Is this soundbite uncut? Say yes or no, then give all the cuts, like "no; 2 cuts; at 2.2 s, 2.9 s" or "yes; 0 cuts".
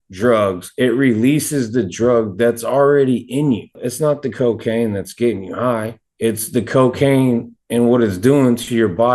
yes; 0 cuts